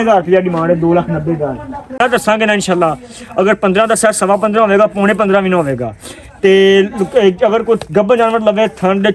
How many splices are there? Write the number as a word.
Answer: one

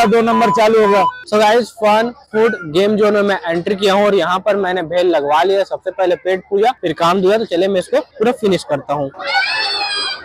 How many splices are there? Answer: three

